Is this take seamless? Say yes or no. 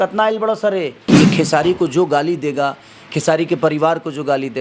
no